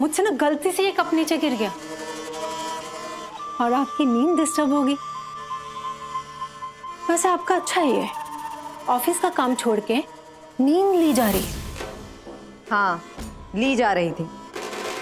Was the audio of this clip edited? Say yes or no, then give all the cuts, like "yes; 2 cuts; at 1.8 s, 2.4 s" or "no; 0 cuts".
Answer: no; 0 cuts